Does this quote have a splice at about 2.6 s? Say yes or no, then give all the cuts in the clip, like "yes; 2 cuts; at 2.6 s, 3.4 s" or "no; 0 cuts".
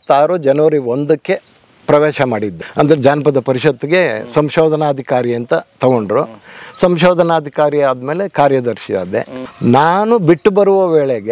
yes; 2 cuts; at 2.6 s, 9.4 s